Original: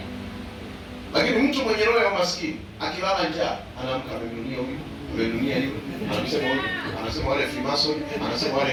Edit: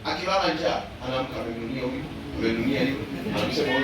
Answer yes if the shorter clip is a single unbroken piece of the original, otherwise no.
yes